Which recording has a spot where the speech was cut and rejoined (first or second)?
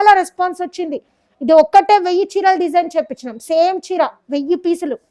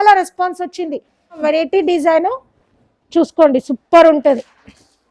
second